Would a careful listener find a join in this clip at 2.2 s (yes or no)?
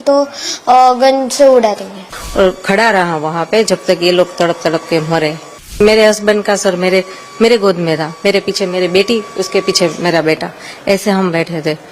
yes